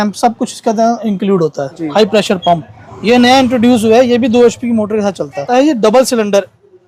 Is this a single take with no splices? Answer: no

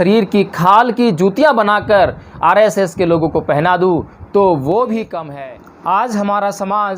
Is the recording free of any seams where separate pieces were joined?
no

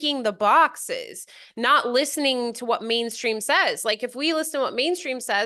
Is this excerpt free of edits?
yes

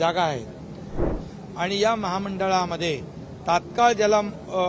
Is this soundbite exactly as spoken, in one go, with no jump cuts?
no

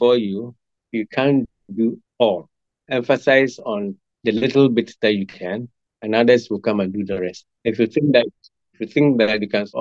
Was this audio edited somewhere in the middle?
yes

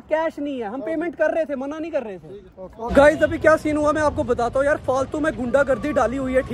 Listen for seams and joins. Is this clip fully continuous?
yes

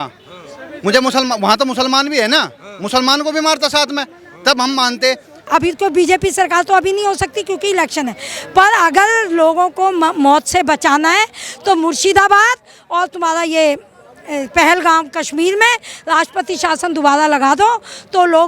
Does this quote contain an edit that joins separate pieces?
yes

